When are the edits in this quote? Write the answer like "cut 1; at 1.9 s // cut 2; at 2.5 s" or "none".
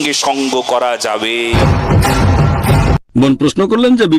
cut 1; at 1.6 s // cut 2; at 3.0 s